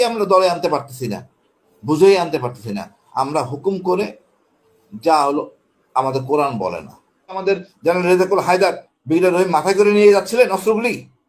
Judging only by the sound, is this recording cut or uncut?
cut